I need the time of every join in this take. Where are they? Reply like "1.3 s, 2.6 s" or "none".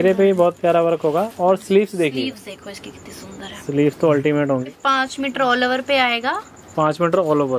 4.7 s